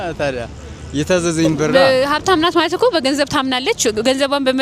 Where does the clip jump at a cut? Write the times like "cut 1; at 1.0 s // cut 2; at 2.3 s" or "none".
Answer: cut 1; at 1.7 s